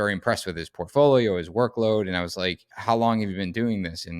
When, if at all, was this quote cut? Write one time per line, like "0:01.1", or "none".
0:02.7